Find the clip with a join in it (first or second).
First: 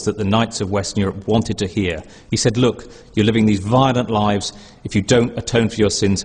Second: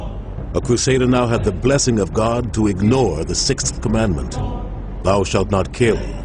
first